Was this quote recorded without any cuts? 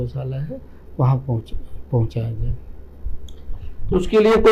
yes; 0 cuts

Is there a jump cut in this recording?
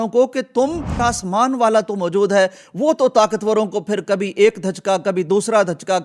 yes; 1 cut; at 0.9 s

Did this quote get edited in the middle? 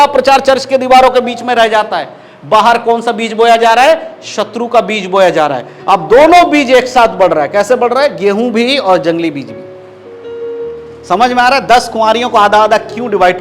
no; 0 cuts

